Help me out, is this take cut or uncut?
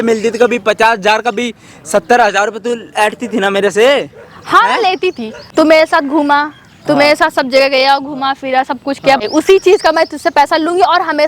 cut